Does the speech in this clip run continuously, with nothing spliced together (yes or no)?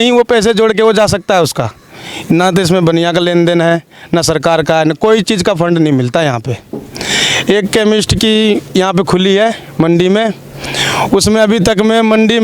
yes